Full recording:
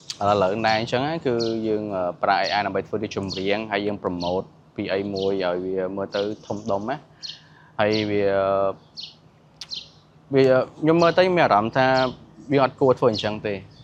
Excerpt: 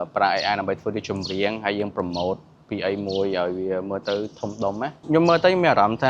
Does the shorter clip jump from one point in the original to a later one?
yes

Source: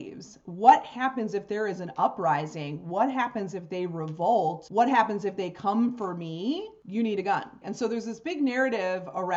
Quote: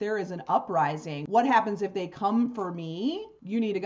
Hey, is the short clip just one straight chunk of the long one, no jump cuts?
no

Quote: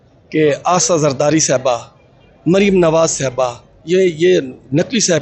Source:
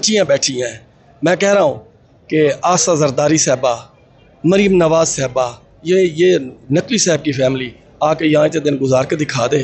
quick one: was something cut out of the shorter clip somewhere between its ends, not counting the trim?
no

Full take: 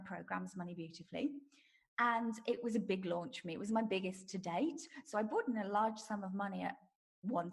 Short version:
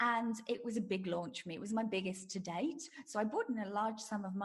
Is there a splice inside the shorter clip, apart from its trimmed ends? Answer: no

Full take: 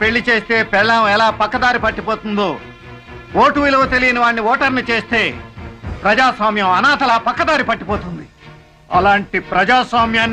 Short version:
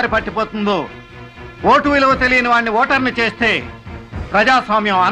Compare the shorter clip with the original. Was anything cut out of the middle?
no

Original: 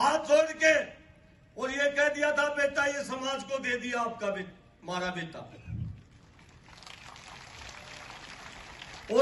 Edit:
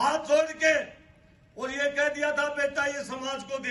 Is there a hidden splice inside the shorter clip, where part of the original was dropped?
no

